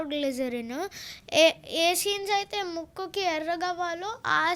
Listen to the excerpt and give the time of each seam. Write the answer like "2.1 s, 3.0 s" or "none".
none